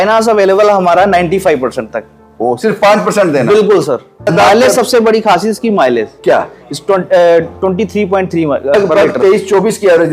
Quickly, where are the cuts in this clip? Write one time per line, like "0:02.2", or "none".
0:04.3
0:08.7